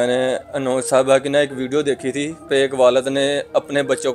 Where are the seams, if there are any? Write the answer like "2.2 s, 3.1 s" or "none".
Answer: 2.5 s